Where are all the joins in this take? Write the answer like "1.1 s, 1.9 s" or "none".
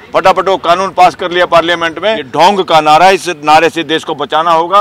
2.2 s